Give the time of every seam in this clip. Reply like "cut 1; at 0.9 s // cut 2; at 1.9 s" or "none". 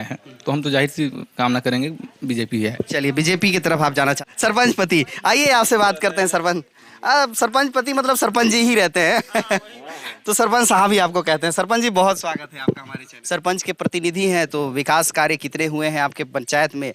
none